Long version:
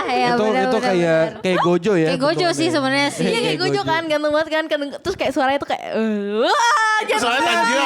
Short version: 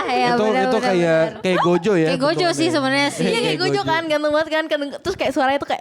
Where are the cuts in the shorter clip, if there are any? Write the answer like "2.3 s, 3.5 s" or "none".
none